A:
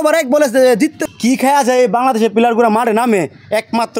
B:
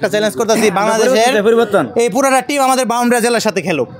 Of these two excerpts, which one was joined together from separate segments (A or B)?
A